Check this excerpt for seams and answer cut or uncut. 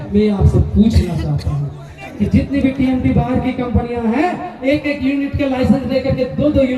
cut